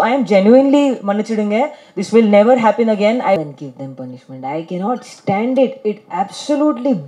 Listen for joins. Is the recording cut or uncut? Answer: cut